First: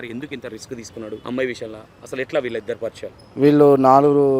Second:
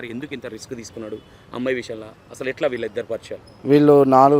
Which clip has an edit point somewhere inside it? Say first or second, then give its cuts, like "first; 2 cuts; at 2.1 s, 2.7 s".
first; 1 cut; at 1.2 s